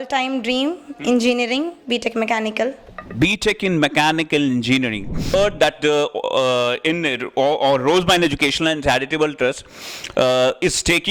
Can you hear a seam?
yes; 1 cut; at 5.3 s

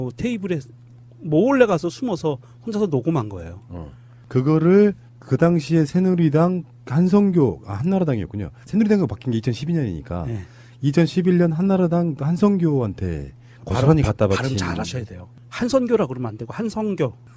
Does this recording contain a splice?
no; 0 cuts

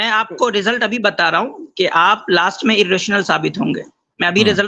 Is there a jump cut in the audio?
no; 0 cuts

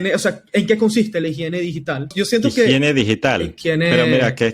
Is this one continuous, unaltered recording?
no; 2 cuts; at 2.1 s, 3.5 s

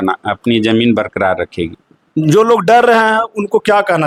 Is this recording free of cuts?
yes; 0 cuts

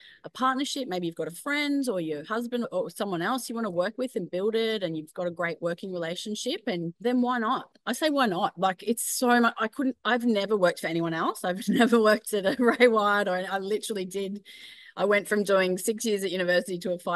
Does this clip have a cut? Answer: yes; 2 cuts; at 2.7 s, 6.9 s

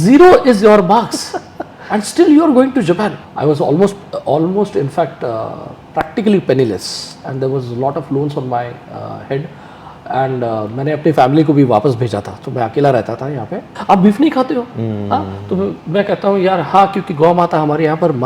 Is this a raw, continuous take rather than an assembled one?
no; 2 cuts; at 3.2 s, 13.7 s

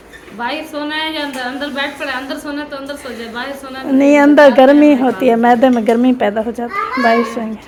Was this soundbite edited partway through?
no; 0 cuts

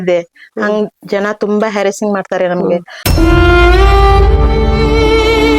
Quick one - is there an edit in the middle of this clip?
no; 0 cuts

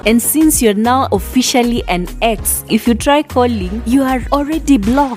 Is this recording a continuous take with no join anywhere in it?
yes; 0 cuts

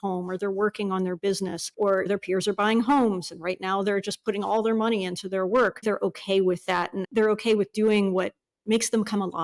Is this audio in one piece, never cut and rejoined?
no; 2 cuts; at 5.8 s, 7.0 s

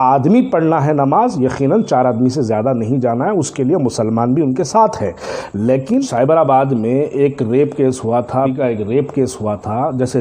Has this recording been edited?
yes; 2 cuts; at 6.1 s, 8.5 s

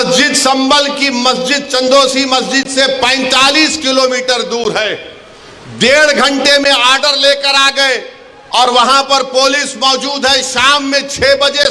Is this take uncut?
yes; 0 cuts

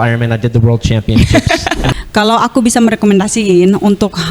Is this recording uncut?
no; 1 cut; at 1.9 s

